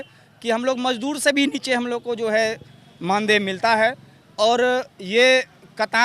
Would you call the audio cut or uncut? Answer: uncut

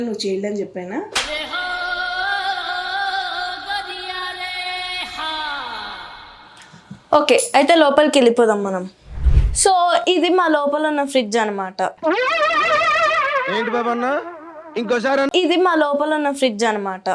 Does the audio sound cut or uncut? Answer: uncut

